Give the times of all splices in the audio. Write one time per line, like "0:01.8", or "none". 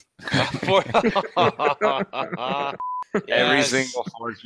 0:02.9